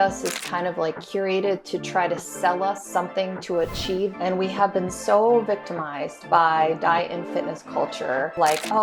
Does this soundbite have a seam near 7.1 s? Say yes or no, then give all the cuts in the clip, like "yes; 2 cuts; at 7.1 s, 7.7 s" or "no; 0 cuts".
no; 1 cut; at 4.1 s